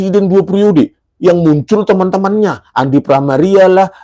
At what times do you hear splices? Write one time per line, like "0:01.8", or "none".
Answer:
none